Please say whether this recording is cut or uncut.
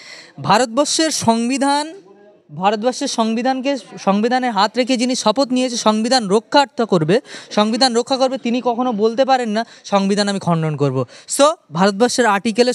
uncut